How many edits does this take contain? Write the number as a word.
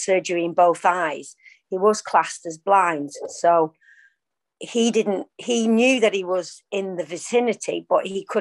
zero